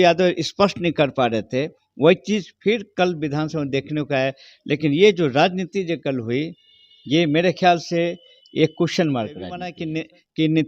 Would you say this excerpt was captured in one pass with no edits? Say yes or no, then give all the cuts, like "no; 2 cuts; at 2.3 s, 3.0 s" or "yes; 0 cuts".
no; 1 cut; at 9.8 s